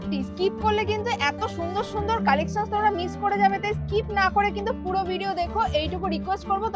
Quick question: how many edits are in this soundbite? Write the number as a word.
zero